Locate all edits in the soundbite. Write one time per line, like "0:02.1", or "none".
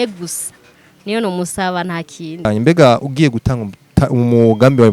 0:02.5